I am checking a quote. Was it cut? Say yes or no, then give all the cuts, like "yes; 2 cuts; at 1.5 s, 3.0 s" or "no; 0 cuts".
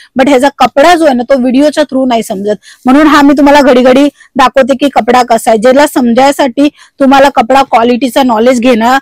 no; 0 cuts